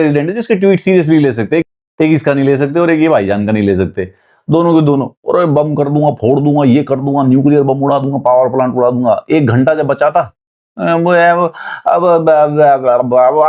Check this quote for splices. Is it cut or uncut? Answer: uncut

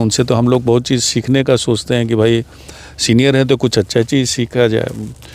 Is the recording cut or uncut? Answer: uncut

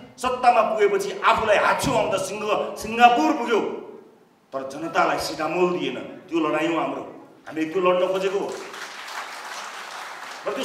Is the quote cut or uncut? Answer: uncut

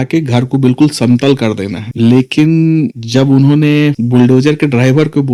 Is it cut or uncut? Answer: uncut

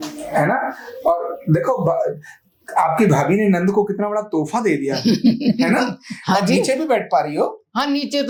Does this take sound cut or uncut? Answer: uncut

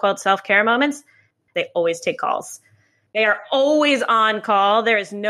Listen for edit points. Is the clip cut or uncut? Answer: cut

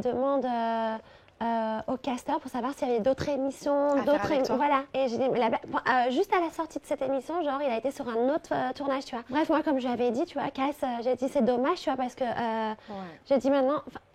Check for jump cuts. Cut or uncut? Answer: uncut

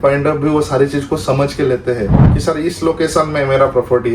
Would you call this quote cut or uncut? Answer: cut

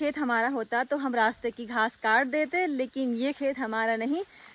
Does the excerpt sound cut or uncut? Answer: uncut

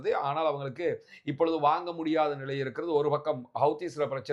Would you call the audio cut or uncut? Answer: uncut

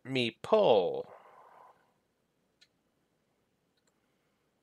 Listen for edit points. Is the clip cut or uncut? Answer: cut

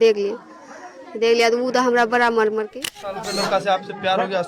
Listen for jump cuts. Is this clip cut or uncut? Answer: cut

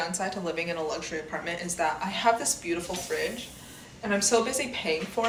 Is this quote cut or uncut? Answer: uncut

